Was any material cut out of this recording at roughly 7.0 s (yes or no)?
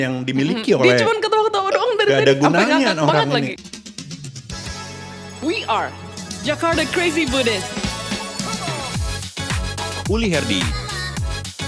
no